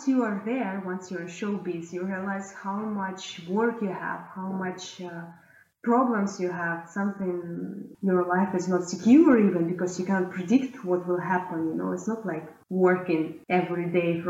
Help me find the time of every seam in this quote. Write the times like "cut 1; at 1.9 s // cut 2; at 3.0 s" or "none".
cut 1; at 12.5 s // cut 2; at 13.4 s